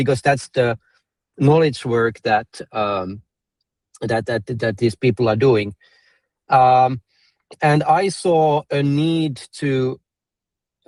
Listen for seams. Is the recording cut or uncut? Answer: uncut